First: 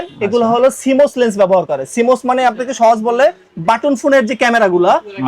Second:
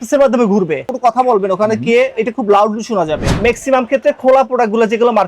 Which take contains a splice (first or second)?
second